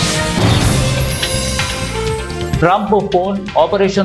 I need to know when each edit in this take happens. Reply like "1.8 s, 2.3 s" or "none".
1.0 s, 2.6 s

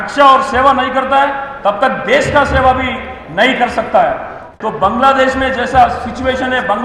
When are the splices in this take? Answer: 4.5 s

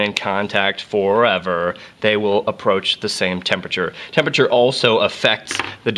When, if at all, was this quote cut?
3.6 s

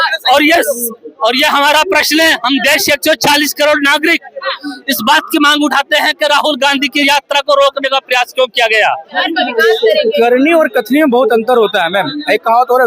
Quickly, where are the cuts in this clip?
9.2 s

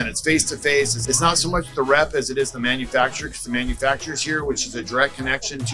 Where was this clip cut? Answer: 1.0 s

